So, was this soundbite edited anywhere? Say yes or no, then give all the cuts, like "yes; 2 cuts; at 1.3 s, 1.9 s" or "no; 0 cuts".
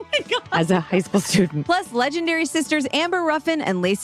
no; 0 cuts